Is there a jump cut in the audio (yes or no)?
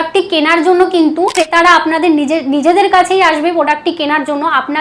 yes